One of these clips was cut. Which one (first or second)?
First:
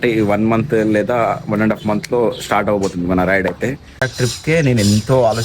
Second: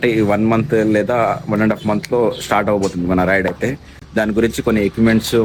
first